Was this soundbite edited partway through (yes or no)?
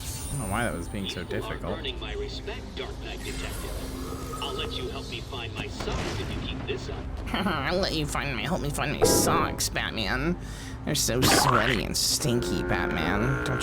yes